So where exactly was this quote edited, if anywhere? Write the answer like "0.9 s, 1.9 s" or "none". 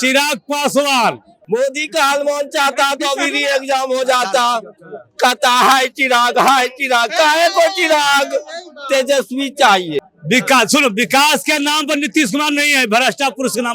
1.3 s, 10.1 s